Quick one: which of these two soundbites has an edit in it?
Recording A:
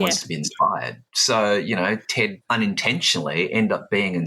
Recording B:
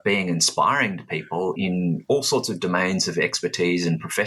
A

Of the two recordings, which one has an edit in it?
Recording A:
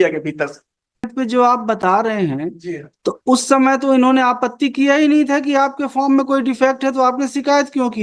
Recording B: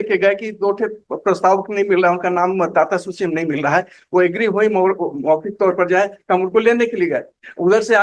A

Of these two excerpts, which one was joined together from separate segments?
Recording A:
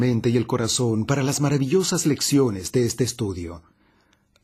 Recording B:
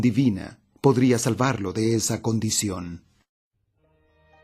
B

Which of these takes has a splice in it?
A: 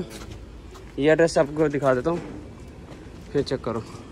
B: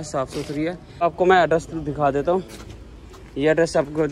B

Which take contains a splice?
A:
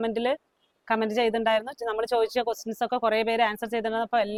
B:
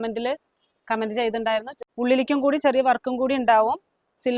B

